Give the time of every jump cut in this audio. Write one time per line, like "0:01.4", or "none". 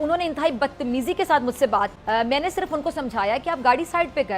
0:02.0